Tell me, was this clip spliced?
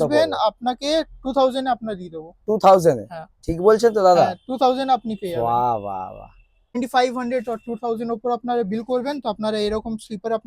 yes; 1 cut; at 6.7 s

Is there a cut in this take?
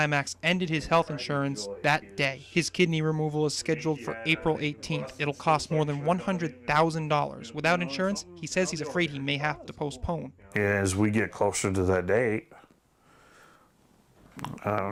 no; 0 cuts

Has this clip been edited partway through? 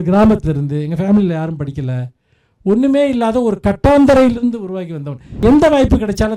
yes; 1 cut; at 5.4 s

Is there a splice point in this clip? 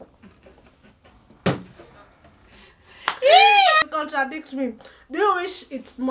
yes; 1 cut; at 3.8 s

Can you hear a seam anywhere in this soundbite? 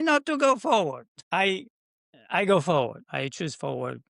yes; 1 cut; at 3.0 s

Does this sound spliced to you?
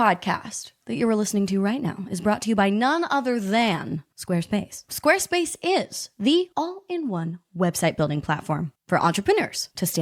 no; 0 cuts

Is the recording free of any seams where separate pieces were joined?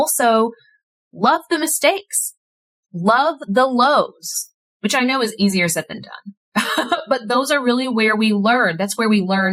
yes; 0 cuts

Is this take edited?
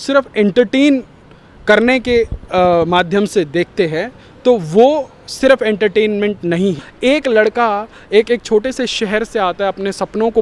yes; 1 cut; at 6.9 s

